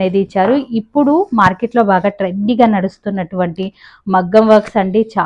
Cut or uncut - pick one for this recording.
uncut